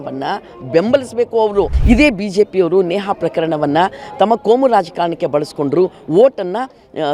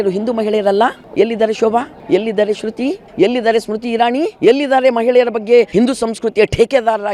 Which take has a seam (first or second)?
first